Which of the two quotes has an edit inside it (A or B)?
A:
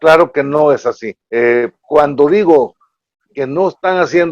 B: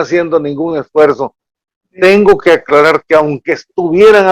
A